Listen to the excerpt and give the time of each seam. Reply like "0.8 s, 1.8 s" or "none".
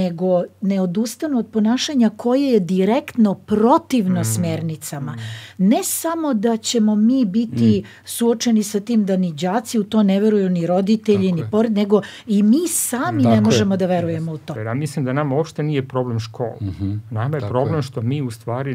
14.5 s